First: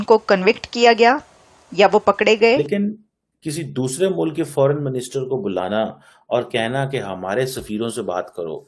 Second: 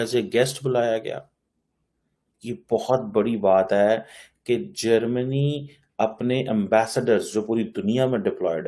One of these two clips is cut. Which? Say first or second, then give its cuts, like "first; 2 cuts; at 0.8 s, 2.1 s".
first; 1 cut; at 2.6 s